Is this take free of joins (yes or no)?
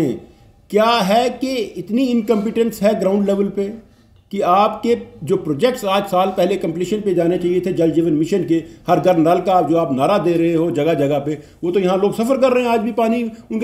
yes